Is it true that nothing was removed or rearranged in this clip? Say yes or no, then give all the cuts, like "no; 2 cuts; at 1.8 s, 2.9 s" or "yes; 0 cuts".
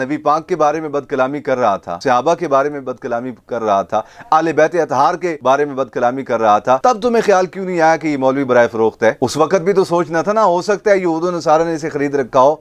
no; 2 cuts; at 1.9 s, 5.4 s